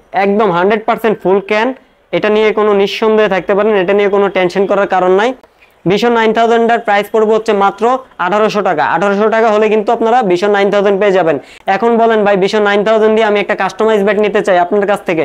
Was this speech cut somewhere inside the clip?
no; 0 cuts

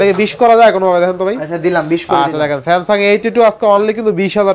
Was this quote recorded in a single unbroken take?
yes; 0 cuts

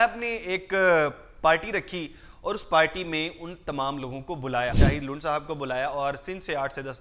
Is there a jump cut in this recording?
yes; 1 cut; at 4.8 s

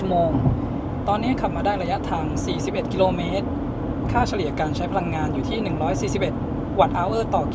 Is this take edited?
no; 0 cuts

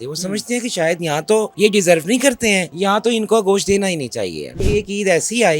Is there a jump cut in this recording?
yes; 3 cuts; at 1.5 s, 2.7 s, 4.6 s

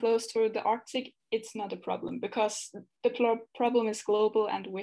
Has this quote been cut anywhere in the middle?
no; 0 cuts

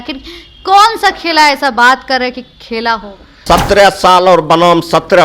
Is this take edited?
yes; 1 cut; at 3.4 s

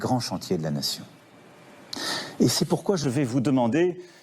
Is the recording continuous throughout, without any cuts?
no; 1 cut; at 3.0 s

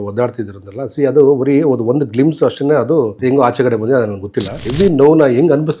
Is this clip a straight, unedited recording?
no; 2 cuts; at 3.1 s, 4.6 s

